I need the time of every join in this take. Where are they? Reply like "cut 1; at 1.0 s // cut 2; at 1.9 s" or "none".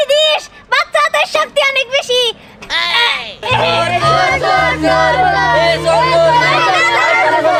none